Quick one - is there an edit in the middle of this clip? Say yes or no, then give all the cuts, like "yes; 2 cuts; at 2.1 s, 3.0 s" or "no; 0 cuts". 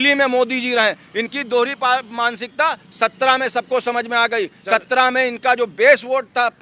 no; 0 cuts